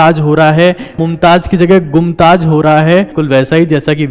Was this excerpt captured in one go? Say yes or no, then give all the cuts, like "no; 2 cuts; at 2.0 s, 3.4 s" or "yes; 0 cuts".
no; 2 cuts; at 1.0 s, 3.2 s